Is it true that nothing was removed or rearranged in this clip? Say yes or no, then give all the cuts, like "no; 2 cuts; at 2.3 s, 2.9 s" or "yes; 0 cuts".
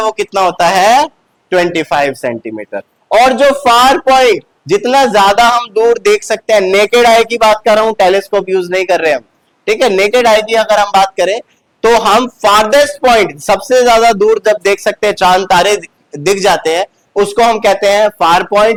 yes; 0 cuts